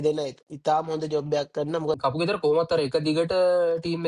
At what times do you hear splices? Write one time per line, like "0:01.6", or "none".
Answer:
0:02.0